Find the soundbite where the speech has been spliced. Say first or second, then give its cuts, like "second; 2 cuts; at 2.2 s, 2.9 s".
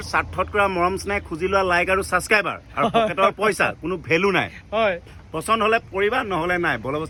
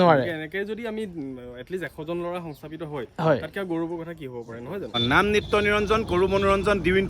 second; 1 cut; at 4.9 s